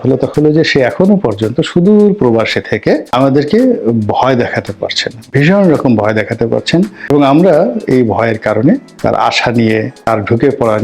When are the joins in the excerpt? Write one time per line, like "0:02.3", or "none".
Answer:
0:03.1
0:07.1
0:08.9
0:10.1